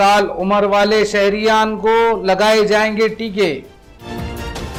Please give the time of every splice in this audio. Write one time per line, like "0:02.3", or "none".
none